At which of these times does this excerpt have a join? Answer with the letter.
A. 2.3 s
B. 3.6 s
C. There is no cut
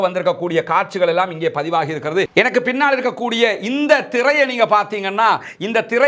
A